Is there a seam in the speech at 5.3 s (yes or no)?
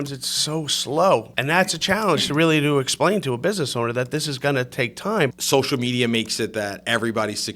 yes